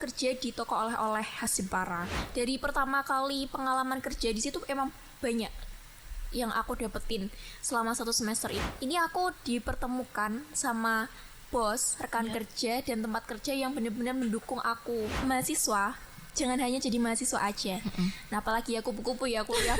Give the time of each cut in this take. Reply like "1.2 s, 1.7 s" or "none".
2.2 s, 8.6 s, 15.1 s